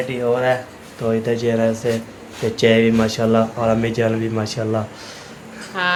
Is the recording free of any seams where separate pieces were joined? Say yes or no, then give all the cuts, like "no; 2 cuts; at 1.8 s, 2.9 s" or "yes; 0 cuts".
yes; 0 cuts